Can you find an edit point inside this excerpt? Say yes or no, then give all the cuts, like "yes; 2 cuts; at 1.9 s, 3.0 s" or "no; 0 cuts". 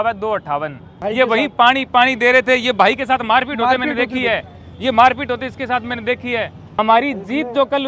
yes; 2 cuts; at 0.9 s, 6.6 s